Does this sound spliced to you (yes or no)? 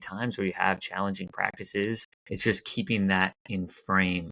yes